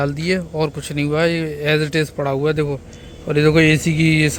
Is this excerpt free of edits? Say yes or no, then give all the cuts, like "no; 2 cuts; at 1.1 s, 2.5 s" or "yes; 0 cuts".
yes; 0 cuts